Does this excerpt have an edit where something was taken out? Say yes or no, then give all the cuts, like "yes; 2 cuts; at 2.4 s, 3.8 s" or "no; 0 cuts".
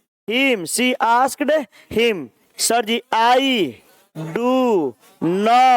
yes; 1 cut; at 2.5 s